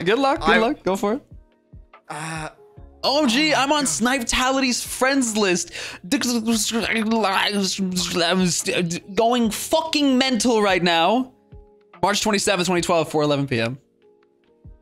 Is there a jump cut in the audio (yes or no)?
no